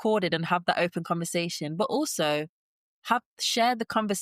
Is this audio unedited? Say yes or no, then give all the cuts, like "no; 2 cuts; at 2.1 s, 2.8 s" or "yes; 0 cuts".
yes; 0 cuts